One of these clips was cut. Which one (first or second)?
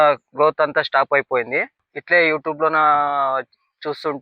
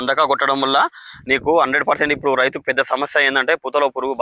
first